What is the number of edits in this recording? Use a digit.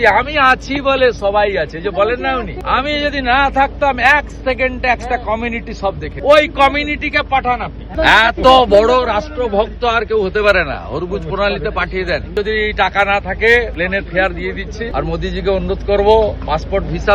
6